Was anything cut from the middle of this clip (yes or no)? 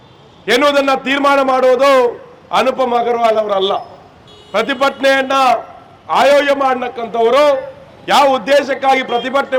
no